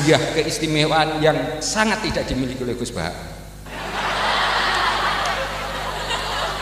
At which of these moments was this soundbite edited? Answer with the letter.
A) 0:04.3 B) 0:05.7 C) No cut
C